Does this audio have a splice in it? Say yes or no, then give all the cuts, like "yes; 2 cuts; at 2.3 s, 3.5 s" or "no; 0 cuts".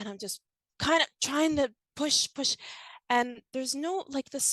no; 0 cuts